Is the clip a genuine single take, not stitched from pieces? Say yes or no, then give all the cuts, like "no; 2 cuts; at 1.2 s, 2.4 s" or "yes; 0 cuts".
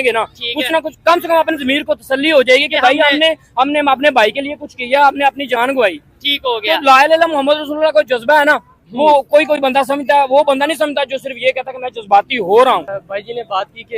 no; 1 cut; at 13.0 s